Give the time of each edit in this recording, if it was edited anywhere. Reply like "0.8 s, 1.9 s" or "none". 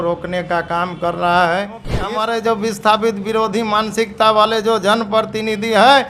2.0 s